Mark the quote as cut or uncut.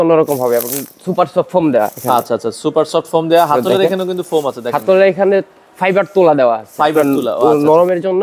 uncut